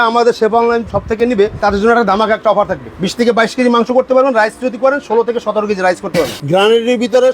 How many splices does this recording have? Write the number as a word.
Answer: three